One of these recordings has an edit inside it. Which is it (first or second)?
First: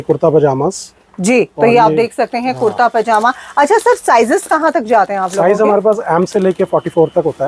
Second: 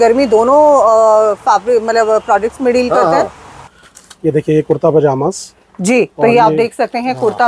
second